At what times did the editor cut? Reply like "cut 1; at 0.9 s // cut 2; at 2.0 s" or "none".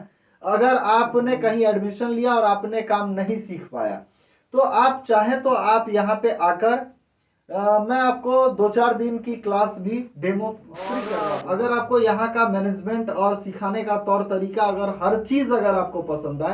cut 1; at 11.1 s